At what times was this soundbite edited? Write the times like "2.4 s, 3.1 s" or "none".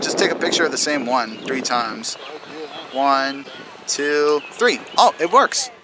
none